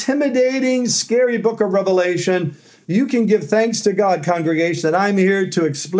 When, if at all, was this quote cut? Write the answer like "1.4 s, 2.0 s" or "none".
none